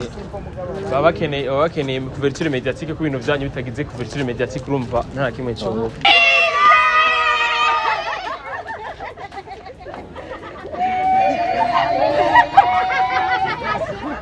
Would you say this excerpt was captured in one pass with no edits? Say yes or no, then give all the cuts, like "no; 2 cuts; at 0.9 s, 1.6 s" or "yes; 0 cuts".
no; 1 cut; at 6.0 s